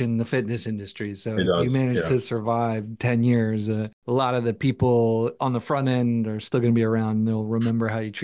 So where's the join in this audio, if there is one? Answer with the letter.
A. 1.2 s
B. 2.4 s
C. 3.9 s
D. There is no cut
C